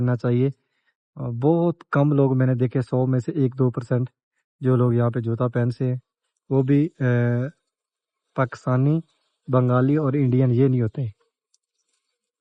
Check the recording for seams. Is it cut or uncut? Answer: uncut